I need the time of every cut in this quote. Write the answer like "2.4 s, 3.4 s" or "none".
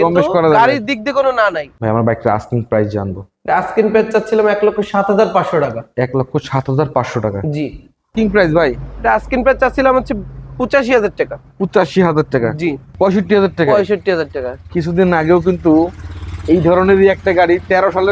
1.7 s, 8.1 s, 12.8 s